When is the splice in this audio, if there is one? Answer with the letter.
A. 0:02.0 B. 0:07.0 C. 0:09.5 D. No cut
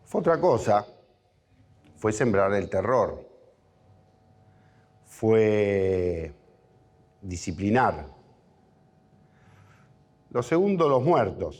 C